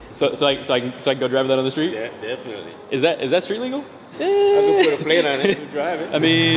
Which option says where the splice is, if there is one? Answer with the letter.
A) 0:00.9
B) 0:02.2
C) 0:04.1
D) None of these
C